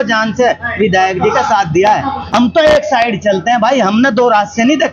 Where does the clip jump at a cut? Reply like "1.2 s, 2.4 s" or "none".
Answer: 2.2 s